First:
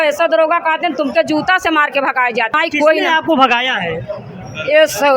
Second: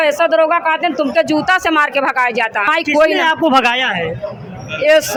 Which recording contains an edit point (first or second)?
first